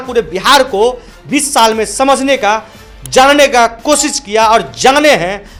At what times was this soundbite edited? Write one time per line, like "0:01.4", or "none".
none